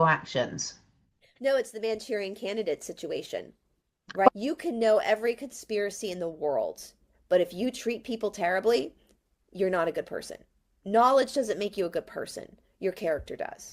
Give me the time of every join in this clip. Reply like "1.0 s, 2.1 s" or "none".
4.3 s